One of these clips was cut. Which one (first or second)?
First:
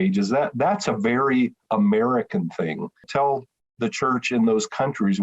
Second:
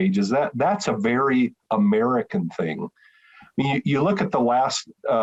first